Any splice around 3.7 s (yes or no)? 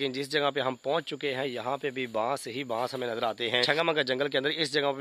yes